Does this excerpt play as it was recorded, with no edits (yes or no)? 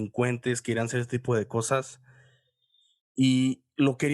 yes